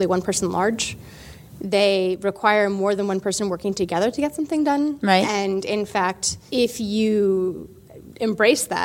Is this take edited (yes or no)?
yes